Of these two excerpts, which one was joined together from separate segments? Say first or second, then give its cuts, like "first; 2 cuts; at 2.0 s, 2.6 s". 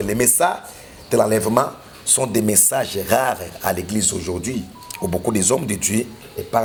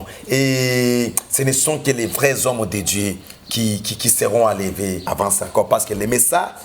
second; 1 cut; at 5.0 s